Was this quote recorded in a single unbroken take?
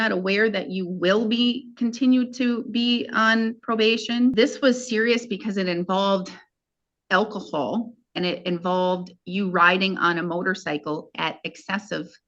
no; 1 cut; at 4.3 s

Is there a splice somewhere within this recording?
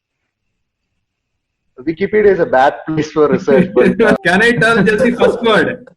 yes; 1 cut; at 4.2 s

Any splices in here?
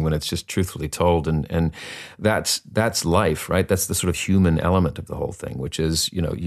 no; 0 cuts

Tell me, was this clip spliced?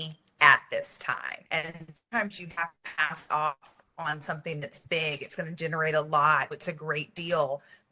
yes; 1 cut; at 1.3 s

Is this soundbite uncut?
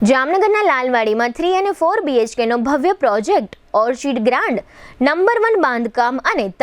yes; 0 cuts

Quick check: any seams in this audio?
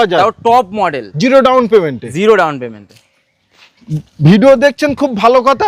no; 0 cuts

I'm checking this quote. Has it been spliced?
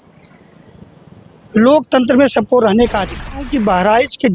yes; 1 cut; at 3.3 s

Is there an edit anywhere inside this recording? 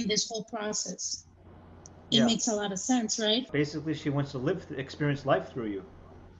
no; 0 cuts

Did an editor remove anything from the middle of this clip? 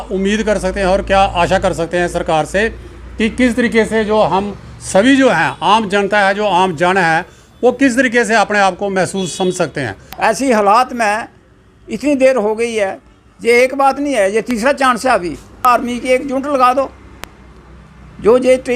yes; 2 cuts; at 10.0 s, 15.6 s

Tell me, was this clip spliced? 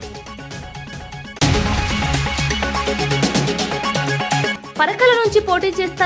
yes; 2 cuts; at 1.2 s, 4.6 s

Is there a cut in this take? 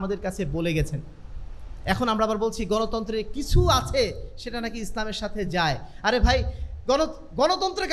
no; 0 cuts

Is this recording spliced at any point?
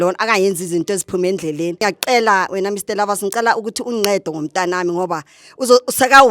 yes; 1 cut; at 1.8 s

